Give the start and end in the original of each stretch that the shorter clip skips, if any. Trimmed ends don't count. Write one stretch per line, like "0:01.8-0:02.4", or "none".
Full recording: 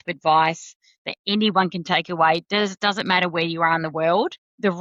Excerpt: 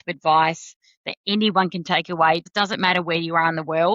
0:02.5-0:02.7